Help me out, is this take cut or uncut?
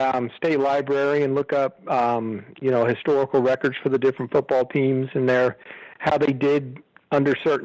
uncut